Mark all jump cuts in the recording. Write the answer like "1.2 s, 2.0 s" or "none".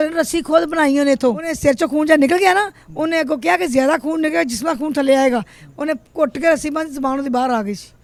none